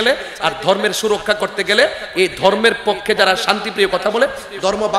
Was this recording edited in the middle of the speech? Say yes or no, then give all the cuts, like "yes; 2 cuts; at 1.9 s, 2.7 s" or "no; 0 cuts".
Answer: no; 0 cuts